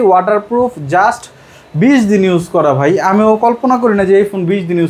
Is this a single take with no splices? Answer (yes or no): yes